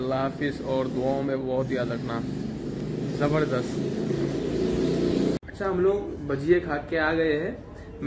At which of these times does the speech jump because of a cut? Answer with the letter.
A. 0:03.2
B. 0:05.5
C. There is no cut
C